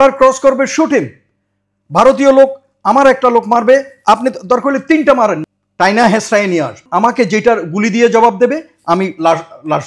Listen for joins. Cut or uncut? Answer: cut